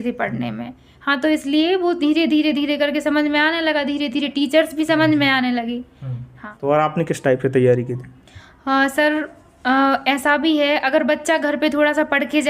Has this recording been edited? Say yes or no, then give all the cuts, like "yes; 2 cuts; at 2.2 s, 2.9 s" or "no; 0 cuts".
no; 0 cuts